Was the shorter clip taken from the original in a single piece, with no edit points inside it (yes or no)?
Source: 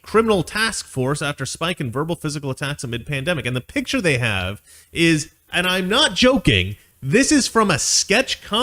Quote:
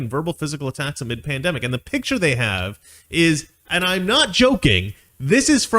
yes